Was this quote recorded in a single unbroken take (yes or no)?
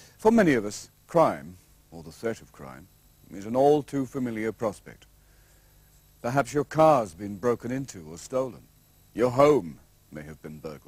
no